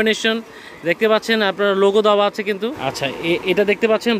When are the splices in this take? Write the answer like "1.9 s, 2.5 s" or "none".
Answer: 2.8 s